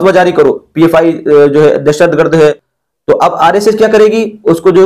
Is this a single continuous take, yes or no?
no